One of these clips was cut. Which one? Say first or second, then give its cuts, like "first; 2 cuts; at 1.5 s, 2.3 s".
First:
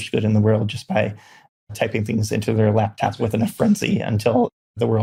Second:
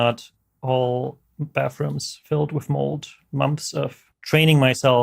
second; 1 cut; at 4.1 s